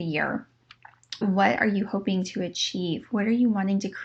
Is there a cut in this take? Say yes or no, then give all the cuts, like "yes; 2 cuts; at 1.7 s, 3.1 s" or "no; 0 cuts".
yes; 1 cut; at 1.2 s